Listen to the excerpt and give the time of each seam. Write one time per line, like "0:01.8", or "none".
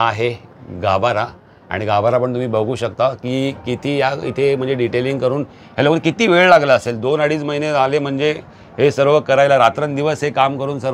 none